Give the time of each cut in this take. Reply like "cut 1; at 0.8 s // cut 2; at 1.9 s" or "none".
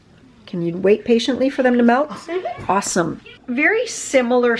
cut 1; at 3.3 s